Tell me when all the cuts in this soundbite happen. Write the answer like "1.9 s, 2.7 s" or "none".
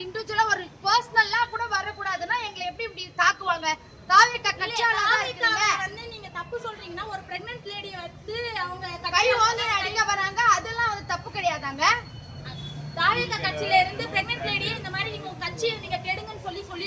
none